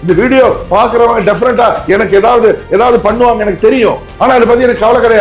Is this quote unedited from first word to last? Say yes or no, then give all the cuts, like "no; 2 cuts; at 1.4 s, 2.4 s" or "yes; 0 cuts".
no; 1 cut; at 4.1 s